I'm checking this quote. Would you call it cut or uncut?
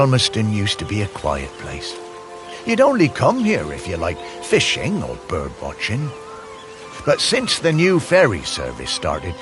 uncut